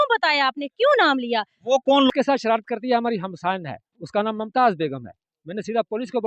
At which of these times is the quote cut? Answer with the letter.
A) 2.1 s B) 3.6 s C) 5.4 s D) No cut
A